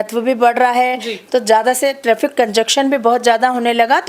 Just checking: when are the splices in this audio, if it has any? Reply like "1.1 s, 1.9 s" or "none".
none